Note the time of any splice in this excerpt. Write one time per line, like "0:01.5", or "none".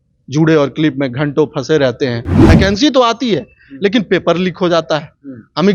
0:02.3